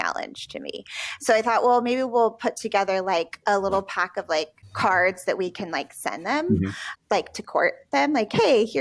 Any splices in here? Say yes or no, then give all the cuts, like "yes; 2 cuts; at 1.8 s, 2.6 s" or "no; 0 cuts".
yes; 2 cuts; at 4.6 s, 6.9 s